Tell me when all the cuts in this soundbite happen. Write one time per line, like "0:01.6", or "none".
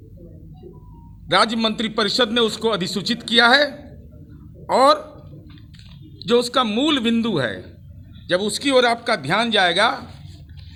none